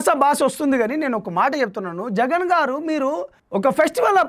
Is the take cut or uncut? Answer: cut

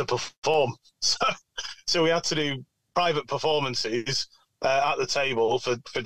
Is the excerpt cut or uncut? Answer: uncut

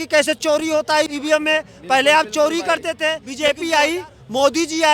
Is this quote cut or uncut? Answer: cut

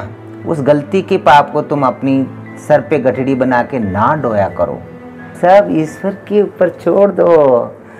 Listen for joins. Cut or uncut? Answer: cut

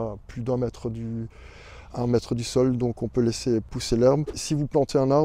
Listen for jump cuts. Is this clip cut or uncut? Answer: cut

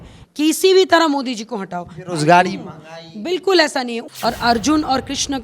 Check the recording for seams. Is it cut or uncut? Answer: cut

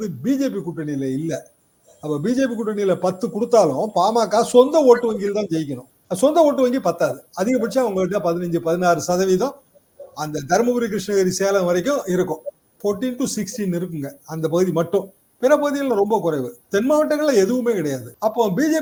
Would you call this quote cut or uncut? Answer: uncut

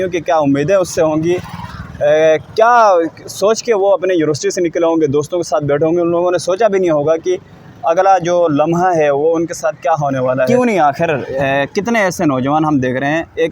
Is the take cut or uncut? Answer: cut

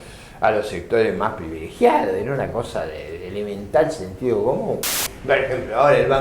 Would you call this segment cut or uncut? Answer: cut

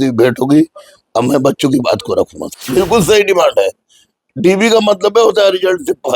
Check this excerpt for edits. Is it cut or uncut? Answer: cut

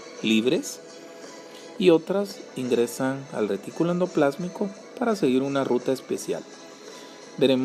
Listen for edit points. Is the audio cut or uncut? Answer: cut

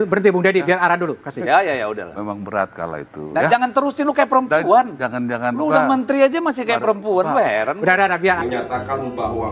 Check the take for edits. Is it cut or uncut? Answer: cut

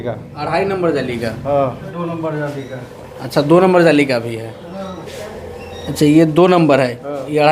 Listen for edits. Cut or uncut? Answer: cut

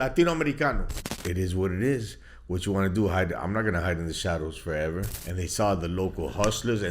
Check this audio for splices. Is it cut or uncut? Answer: cut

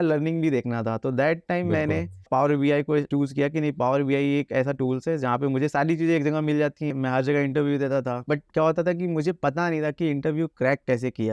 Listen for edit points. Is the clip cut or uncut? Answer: cut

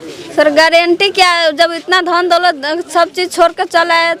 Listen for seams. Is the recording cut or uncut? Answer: uncut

